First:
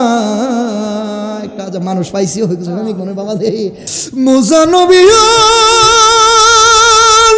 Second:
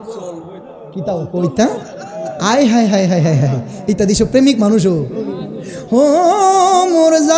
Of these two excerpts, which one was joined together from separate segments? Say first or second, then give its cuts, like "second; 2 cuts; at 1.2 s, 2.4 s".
first; 1 cut; at 3.9 s